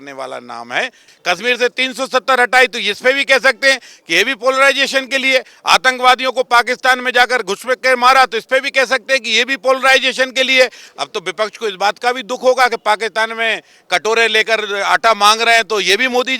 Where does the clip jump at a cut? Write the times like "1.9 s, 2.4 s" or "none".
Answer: 1.1 s, 10.8 s